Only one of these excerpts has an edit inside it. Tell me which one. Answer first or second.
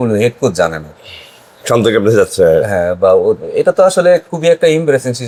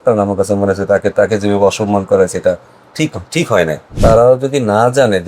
second